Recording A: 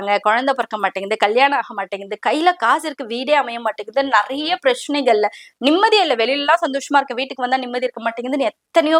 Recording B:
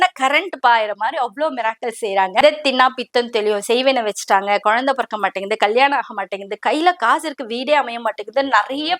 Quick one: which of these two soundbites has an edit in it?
B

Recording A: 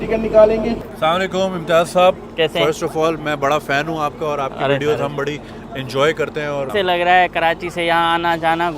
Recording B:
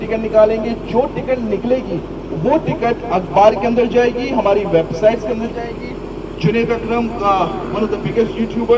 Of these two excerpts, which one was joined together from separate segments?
A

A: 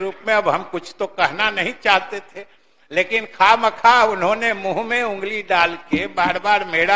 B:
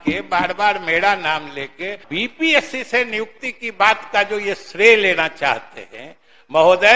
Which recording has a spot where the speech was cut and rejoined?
B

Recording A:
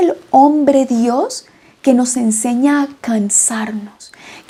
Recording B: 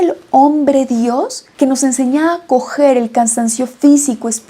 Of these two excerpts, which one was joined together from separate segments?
B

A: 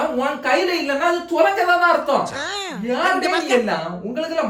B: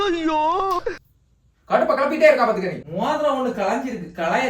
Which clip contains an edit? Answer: B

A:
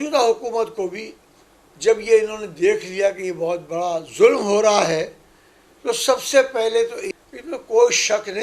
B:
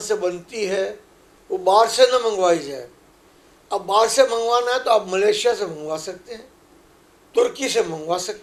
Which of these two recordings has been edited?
A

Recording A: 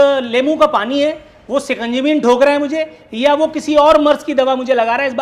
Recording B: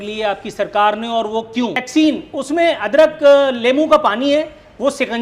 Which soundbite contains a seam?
B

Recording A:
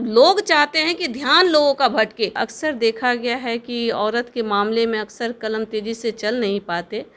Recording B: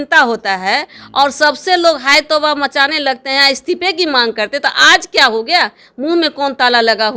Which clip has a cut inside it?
A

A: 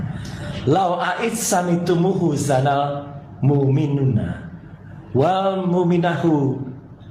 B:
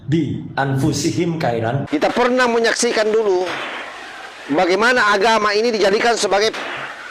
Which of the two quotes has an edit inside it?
B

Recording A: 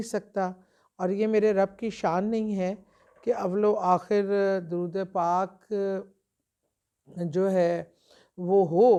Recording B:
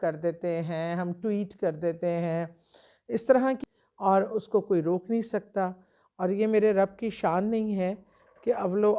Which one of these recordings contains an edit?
B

